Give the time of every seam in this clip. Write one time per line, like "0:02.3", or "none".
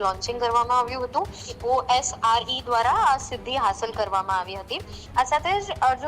0:01.5
0:05.0